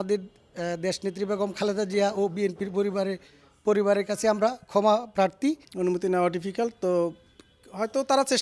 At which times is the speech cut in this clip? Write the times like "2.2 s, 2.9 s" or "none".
5.7 s